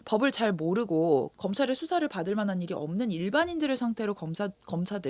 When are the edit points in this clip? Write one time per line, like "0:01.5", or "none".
0:01.3